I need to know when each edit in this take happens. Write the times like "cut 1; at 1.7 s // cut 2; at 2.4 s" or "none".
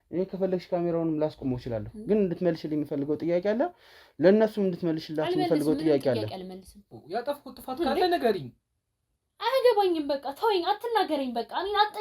cut 1; at 6.9 s